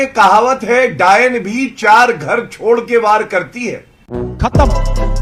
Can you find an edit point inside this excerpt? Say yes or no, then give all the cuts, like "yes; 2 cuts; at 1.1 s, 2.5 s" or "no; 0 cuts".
no; 0 cuts